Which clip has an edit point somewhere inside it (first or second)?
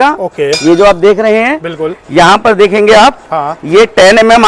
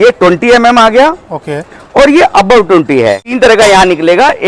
second